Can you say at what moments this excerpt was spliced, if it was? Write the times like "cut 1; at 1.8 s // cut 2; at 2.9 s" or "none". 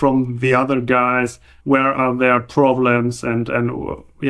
cut 1; at 1.5 s